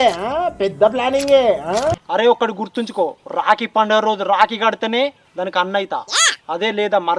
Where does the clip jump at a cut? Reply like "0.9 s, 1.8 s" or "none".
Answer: 2.0 s